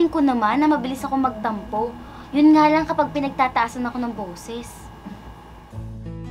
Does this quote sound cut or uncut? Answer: uncut